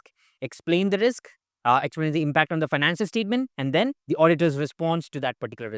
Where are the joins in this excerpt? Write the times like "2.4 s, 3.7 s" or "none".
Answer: 1.4 s, 4.0 s